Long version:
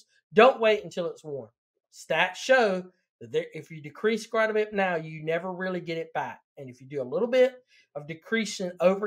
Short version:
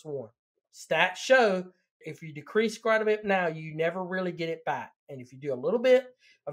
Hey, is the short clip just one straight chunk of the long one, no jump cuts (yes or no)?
no